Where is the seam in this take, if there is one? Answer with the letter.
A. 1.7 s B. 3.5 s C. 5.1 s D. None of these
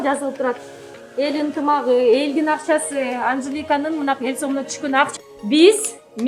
C